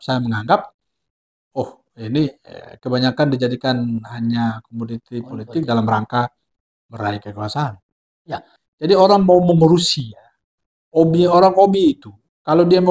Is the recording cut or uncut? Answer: cut